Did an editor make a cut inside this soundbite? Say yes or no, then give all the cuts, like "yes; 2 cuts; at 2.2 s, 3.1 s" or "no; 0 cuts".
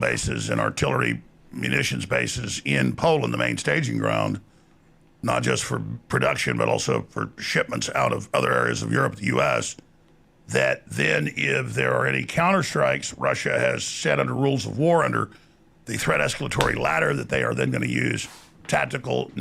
no; 0 cuts